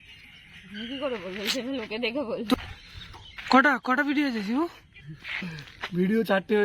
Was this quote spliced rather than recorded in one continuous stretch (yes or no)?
yes